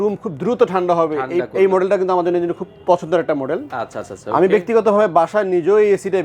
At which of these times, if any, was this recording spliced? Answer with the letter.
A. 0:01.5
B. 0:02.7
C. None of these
C